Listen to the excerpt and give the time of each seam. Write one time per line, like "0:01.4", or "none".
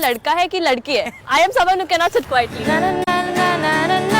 none

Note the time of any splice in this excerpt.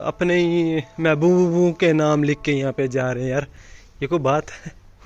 none

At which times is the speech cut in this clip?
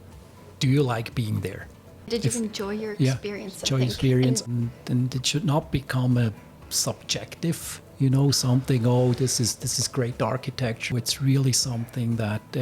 0:02.1
0:04.4
0:10.9

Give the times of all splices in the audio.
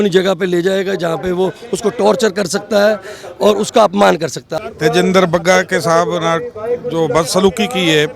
0:04.4

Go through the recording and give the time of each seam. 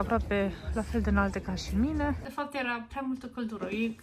0:02.2

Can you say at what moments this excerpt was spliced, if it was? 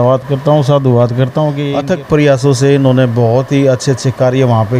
0:01.7

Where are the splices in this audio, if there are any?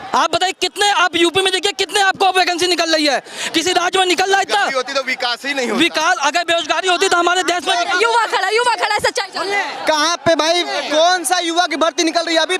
none

